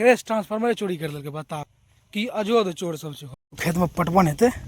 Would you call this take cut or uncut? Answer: cut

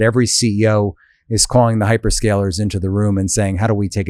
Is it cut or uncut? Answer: uncut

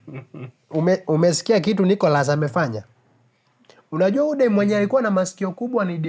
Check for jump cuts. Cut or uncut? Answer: uncut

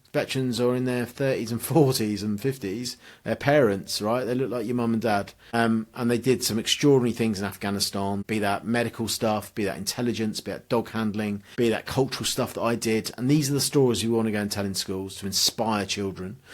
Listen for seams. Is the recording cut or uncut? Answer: cut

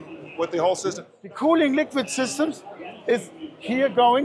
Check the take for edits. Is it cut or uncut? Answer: cut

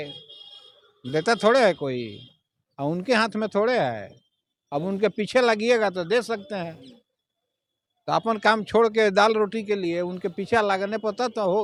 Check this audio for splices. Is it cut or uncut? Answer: uncut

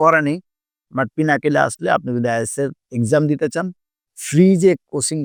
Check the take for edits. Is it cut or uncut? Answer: uncut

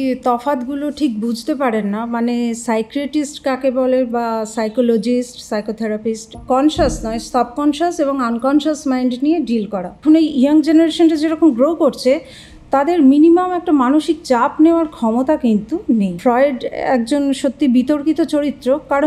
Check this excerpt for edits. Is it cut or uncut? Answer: cut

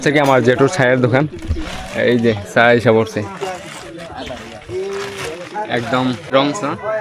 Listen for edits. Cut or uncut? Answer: uncut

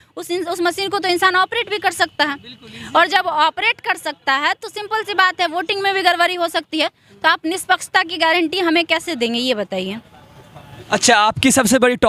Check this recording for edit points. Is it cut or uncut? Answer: uncut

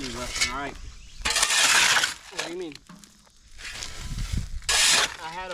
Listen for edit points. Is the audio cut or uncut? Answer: uncut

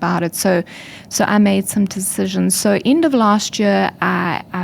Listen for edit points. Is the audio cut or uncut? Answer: uncut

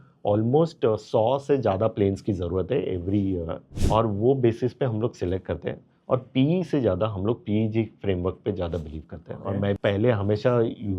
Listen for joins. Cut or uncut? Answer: cut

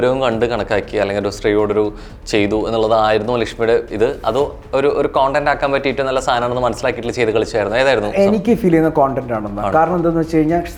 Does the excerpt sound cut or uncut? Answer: uncut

